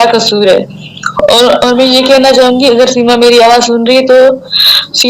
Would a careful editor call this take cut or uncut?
uncut